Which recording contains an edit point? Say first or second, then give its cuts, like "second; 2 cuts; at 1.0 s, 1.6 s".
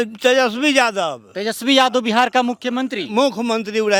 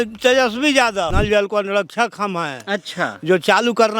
second; 1 cut; at 1.1 s